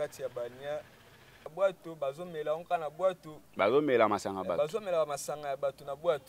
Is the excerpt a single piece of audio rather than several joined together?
no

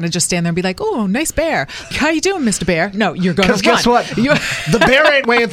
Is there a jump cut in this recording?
no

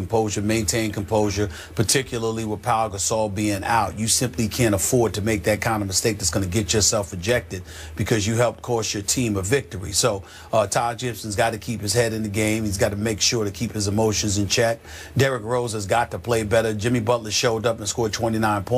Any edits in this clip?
yes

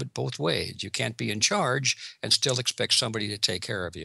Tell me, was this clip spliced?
no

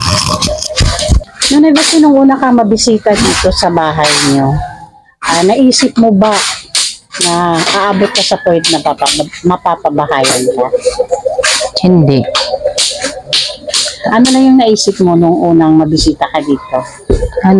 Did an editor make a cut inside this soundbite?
yes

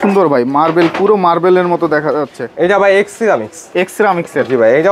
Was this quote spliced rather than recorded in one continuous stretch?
no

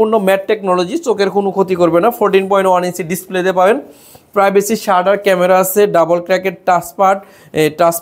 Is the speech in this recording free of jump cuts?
yes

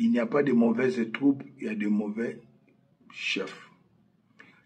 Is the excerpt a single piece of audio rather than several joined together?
yes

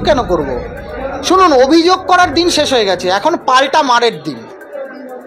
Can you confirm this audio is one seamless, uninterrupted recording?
yes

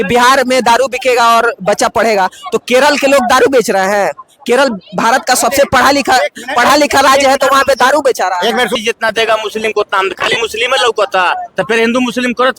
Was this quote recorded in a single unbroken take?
no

